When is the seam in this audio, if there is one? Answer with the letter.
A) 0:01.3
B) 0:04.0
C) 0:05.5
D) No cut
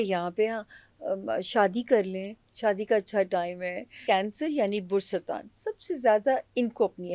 B